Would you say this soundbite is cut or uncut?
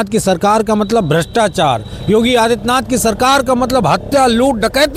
uncut